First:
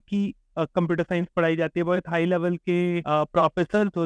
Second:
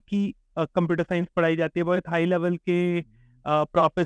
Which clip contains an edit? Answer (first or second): first